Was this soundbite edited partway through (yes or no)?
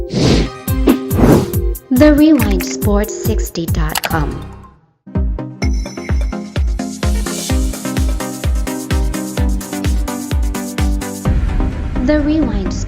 yes